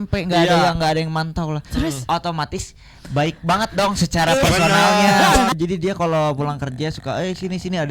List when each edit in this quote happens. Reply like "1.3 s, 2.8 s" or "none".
5.5 s